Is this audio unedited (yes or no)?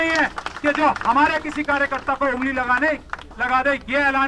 yes